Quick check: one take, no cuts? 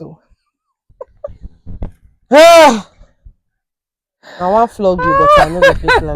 yes; 0 cuts

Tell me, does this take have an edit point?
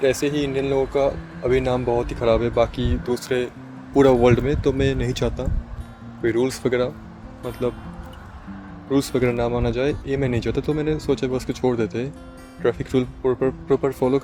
no; 0 cuts

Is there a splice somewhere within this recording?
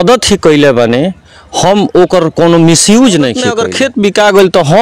yes; 1 cut; at 3.6 s

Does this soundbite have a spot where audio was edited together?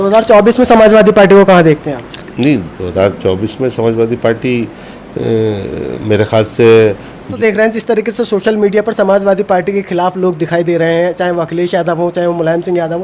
yes; 1 cut; at 7.2 s

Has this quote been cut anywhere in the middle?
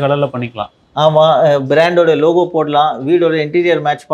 no; 0 cuts

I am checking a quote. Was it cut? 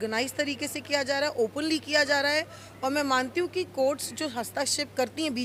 no; 0 cuts

